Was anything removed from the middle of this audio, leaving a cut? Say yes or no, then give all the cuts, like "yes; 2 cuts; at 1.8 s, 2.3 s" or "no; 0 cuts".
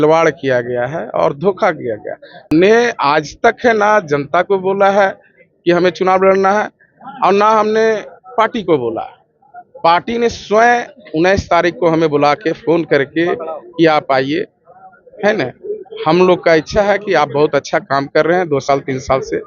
yes; 1 cut; at 2.5 s